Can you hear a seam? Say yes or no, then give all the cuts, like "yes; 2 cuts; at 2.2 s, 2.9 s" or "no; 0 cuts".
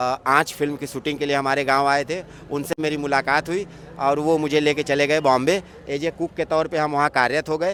no; 0 cuts